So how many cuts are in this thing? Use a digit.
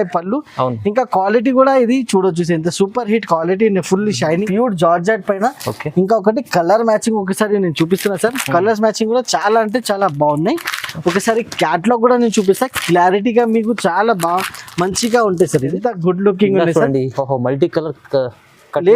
2